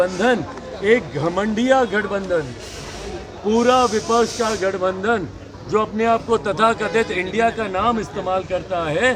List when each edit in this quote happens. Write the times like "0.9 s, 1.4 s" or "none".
none